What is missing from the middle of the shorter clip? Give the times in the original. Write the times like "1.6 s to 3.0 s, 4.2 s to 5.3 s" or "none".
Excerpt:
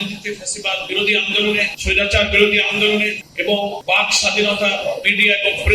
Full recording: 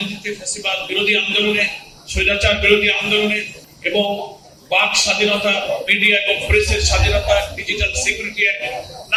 1.8 s to 2.1 s, 3.8 s to 4.3 s

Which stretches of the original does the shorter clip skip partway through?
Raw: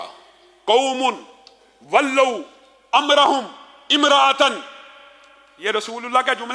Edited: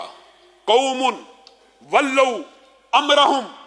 none

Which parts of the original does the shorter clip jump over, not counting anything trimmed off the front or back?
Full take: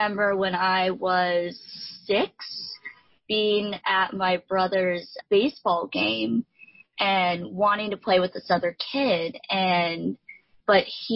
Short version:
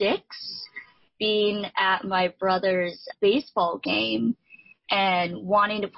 none

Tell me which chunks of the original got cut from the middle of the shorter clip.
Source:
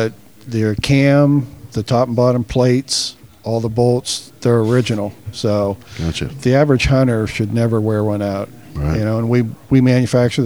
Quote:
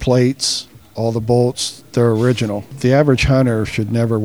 5.2 s to 6.3 s

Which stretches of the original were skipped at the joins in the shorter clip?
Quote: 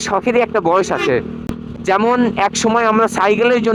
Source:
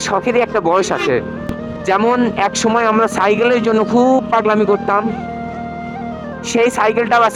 none

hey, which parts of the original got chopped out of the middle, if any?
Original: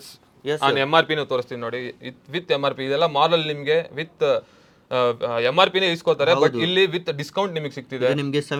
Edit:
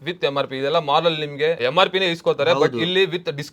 3.9 s to 5.4 s

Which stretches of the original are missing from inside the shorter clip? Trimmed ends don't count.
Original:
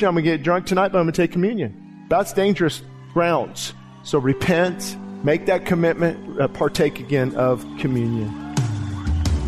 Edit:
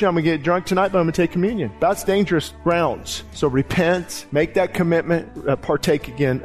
1.7 s to 2.0 s, 3.1 s to 3.5 s, 4.9 s to 5.1 s

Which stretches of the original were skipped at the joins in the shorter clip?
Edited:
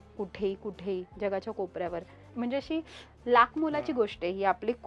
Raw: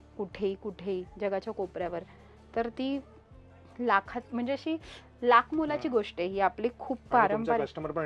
2.3 s to 4.3 s

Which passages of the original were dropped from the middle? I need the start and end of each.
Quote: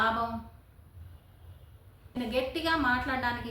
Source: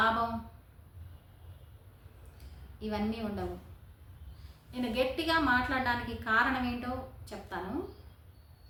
2.2 s to 4.8 s

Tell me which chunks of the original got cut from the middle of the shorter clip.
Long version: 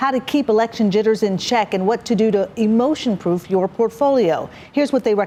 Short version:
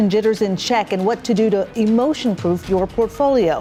none

